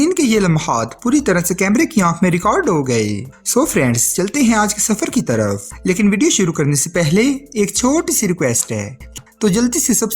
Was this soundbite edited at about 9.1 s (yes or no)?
yes